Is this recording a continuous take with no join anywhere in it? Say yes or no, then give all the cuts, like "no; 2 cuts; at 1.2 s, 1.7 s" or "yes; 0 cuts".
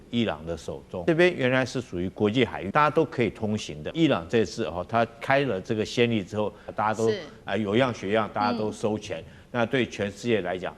no; 4 cuts; at 1.0 s, 2.6 s, 3.9 s, 6.6 s